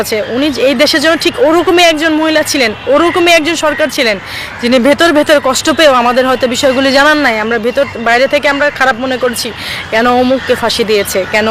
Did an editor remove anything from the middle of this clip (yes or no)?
no